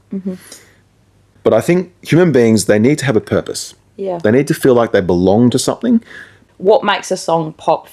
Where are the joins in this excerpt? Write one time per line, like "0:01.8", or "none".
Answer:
0:01.2
0:06.4